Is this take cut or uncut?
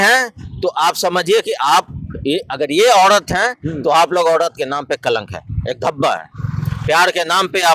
uncut